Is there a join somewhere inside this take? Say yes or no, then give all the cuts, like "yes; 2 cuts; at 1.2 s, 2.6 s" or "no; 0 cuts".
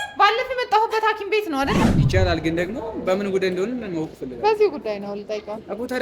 yes; 1 cut; at 1.9 s